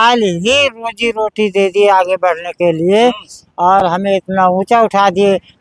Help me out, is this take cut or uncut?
uncut